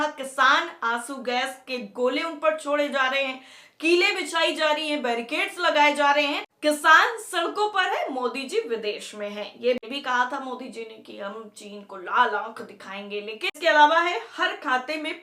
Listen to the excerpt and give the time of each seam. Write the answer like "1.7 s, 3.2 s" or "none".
6.5 s, 9.8 s, 13.5 s